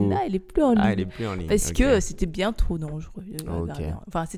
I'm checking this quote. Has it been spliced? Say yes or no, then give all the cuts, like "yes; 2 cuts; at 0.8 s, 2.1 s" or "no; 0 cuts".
no; 0 cuts